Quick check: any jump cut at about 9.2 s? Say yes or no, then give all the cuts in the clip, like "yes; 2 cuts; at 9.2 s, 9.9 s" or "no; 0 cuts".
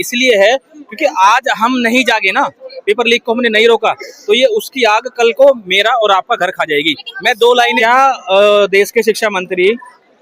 no; 1 cut; at 7.8 s